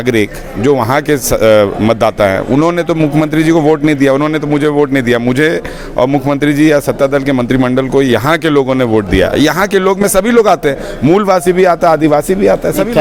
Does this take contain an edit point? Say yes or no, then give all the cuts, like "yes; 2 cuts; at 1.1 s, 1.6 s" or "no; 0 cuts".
no; 0 cuts